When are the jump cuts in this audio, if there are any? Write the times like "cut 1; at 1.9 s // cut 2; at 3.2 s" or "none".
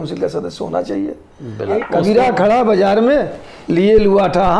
cut 1; at 1.8 s